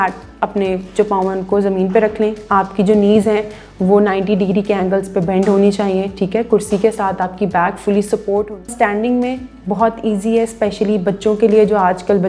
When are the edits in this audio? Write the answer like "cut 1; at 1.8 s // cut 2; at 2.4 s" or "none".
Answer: cut 1; at 8.7 s